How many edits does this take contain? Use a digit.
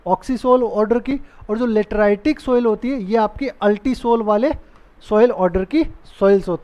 0